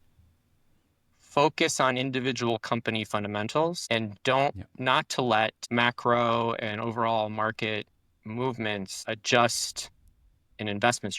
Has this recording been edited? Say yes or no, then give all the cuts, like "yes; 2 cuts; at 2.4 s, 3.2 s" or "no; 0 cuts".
yes; 3 cuts; at 3.8 s, 5.6 s, 9.0 s